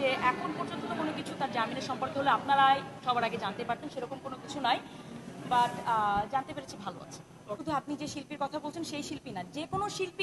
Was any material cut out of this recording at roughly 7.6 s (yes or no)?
yes